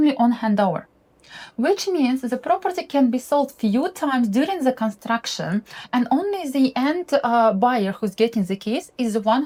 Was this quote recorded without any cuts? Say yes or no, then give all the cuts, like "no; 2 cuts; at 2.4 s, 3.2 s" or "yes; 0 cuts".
yes; 0 cuts